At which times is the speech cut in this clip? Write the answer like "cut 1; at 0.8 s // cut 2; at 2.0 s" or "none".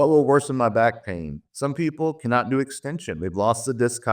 cut 1; at 1.4 s